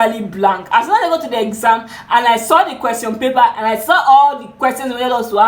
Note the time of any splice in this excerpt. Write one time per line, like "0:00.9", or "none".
none